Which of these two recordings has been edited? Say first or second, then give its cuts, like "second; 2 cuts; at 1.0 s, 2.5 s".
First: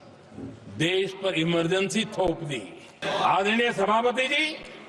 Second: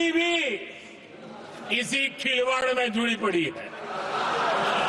first; 1 cut; at 3.0 s